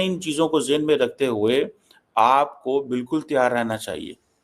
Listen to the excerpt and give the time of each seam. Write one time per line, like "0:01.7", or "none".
none